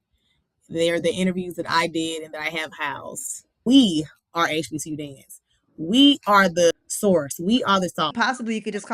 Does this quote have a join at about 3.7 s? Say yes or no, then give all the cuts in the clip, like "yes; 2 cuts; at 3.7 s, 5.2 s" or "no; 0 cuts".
yes; 3 cuts; at 3.7 s, 6.7 s, 8.1 s